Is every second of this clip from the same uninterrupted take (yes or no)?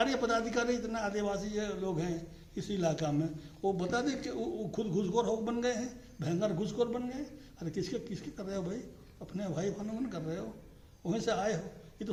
yes